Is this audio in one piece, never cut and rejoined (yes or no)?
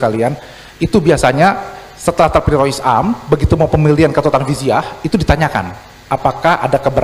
yes